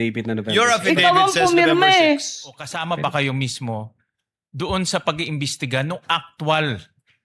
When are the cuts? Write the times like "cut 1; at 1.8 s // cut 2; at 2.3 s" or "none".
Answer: cut 1; at 2.7 s